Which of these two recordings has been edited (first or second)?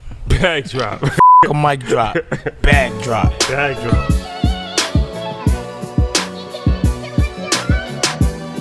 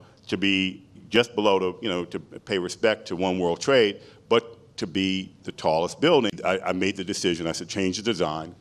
second